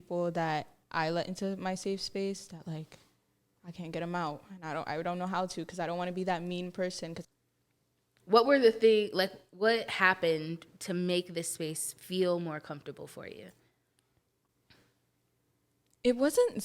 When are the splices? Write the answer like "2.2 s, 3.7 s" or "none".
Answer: 7.2 s